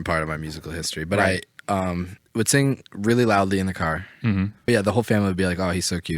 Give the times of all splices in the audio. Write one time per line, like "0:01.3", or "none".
0:02.2
0:04.7